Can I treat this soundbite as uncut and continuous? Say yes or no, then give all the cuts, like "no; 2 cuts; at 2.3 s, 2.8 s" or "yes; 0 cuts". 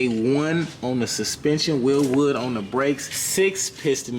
no; 1 cut; at 3.2 s